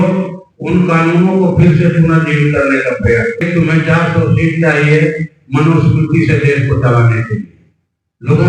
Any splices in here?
yes; 1 cut; at 3.4 s

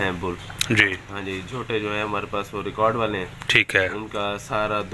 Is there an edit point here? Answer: no; 0 cuts

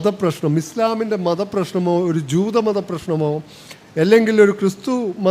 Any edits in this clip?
no; 0 cuts

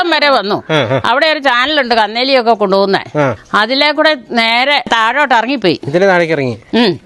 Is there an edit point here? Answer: yes; 2 cuts; at 3.4 s, 4.9 s

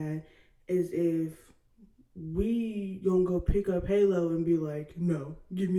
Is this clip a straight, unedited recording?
yes; 0 cuts

